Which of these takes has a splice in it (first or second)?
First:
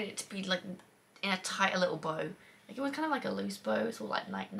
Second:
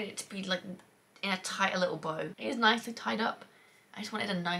second